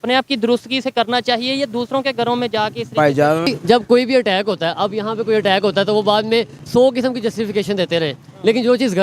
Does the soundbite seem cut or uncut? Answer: cut